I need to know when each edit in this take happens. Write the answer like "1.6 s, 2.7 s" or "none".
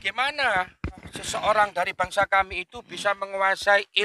1.1 s